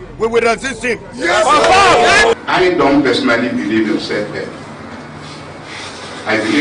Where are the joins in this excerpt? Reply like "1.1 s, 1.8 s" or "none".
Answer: 2.3 s